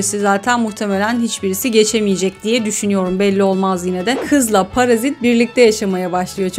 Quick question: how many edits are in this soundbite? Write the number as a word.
one